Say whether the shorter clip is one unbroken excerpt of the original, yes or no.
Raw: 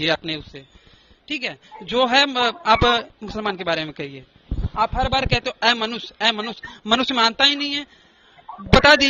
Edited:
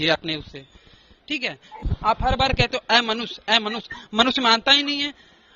no